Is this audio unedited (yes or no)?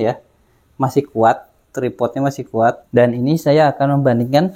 no